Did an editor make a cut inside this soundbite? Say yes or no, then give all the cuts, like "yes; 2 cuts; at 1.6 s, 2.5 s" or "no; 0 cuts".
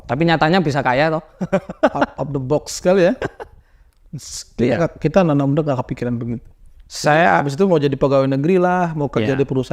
no; 0 cuts